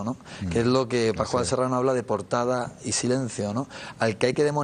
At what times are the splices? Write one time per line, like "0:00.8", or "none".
none